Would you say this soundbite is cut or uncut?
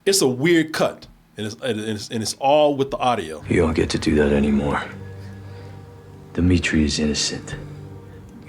cut